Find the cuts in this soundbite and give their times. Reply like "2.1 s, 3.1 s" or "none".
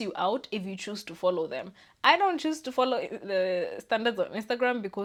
none